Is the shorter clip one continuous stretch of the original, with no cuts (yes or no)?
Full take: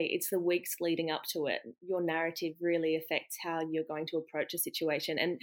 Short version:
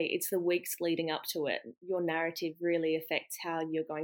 yes